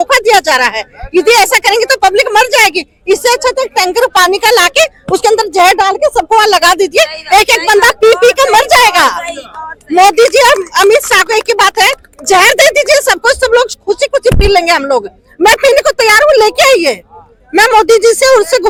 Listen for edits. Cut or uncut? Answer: uncut